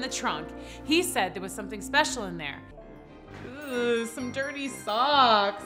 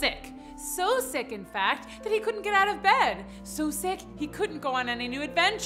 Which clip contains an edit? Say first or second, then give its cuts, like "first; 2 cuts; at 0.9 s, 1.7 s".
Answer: first; 1 cut; at 2.9 s